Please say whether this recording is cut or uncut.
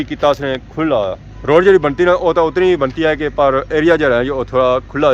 uncut